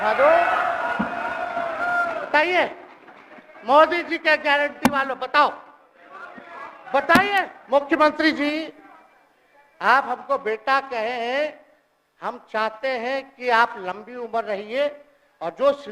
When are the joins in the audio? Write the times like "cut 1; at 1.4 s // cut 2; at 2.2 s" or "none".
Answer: cut 1; at 7.6 s